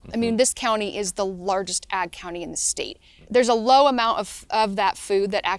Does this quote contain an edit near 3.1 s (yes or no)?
yes